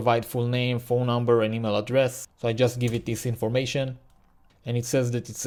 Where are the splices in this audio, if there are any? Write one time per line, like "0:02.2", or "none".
none